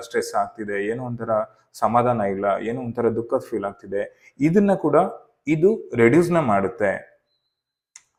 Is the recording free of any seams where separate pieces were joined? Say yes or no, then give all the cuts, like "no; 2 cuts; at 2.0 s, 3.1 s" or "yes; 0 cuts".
yes; 0 cuts